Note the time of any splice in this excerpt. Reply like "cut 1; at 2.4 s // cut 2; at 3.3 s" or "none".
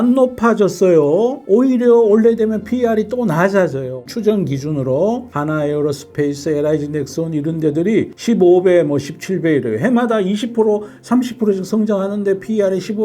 cut 1; at 1.4 s // cut 2; at 4.0 s